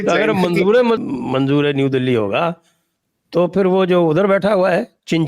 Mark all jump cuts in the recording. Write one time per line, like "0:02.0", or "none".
0:01.0